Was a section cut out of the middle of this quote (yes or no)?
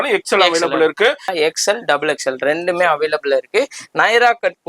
yes